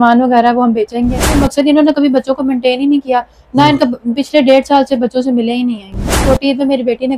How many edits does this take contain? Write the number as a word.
two